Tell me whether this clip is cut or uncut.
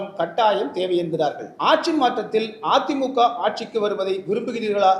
cut